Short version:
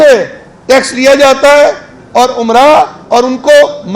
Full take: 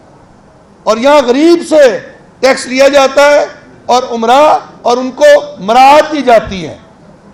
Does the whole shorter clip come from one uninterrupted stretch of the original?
yes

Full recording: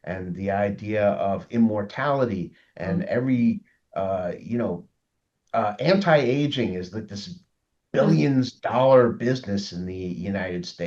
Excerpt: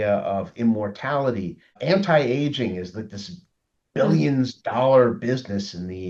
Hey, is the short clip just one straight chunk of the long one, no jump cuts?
no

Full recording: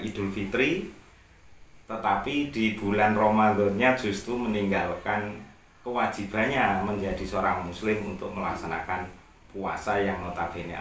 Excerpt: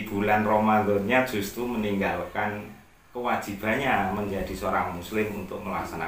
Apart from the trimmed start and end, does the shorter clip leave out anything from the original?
no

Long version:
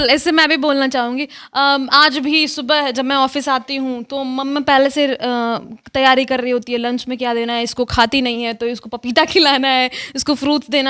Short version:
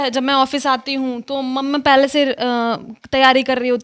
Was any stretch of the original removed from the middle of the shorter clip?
no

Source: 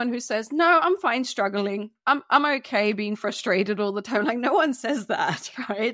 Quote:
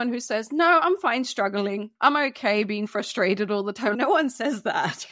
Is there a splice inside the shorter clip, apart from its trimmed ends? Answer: yes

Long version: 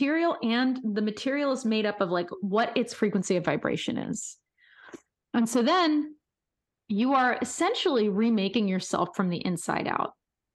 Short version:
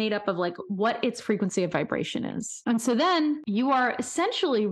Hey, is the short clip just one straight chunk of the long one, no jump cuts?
no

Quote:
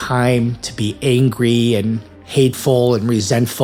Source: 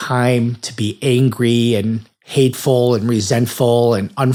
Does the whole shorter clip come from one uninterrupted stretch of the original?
yes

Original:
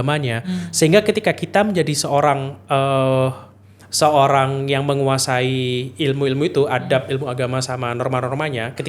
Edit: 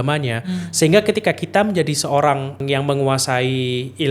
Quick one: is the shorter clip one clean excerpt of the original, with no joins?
no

